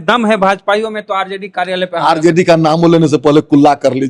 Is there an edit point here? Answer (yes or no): no